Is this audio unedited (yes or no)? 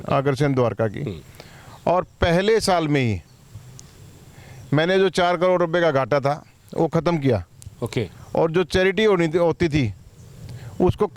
yes